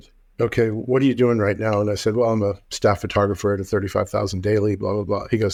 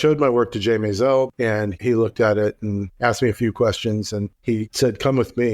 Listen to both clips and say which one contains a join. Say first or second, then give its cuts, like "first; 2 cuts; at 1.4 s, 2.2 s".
second; 3 cuts; at 1.3 s, 2.9 s, 4.3 s